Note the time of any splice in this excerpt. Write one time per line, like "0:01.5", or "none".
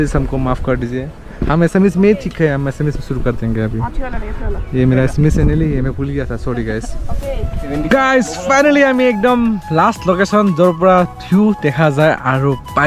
0:07.5